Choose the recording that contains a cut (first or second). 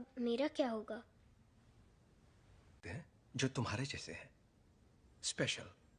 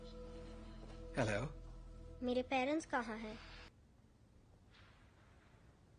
second